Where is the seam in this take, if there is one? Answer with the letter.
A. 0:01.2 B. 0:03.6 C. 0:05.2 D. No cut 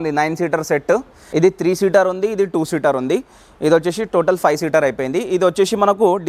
A